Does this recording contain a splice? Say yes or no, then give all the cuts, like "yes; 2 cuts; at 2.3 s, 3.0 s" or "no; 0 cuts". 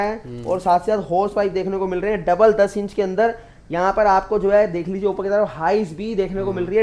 no; 0 cuts